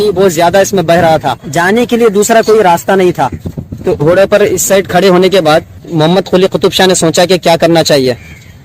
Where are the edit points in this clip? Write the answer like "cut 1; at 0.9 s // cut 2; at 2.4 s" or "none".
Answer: cut 1; at 1.4 s // cut 2; at 4.0 s // cut 3; at 5.9 s